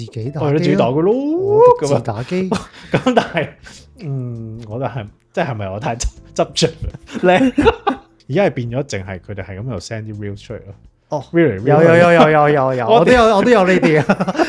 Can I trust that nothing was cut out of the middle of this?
no; 1 cut; at 8.1 s

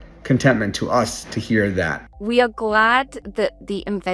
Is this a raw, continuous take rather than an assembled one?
no; 1 cut; at 2.1 s

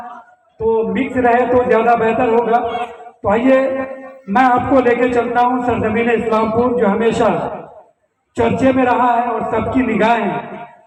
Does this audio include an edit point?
no; 0 cuts

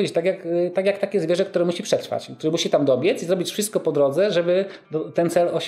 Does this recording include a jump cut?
no; 0 cuts

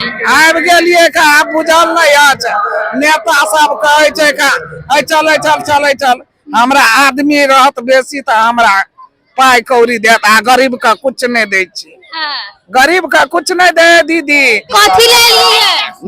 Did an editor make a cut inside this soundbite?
yes; 1 cut; at 14.6 s

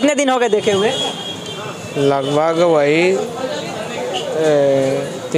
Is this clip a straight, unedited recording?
yes; 0 cuts

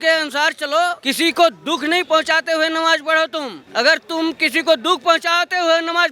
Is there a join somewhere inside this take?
yes; 2 cuts; at 1.0 s, 3.6 s

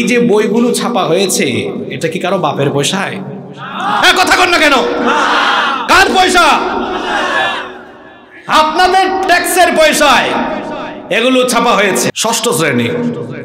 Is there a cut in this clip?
yes; 1 cut; at 12.1 s

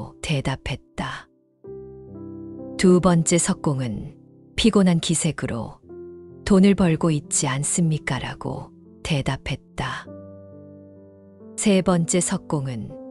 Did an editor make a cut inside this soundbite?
yes; 2 cuts; at 10.0 s, 11.6 s

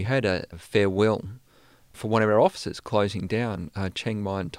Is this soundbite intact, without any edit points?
no; 1 cut; at 2.0 s

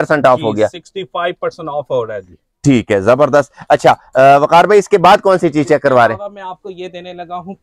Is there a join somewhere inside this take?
no; 0 cuts

